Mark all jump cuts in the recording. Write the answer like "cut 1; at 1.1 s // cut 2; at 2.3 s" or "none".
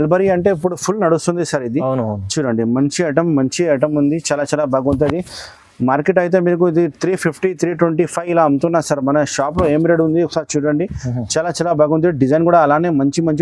none